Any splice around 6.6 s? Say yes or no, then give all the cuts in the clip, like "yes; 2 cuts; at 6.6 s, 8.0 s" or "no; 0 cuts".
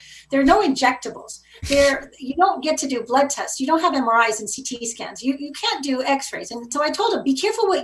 yes; 1 cut; at 6.6 s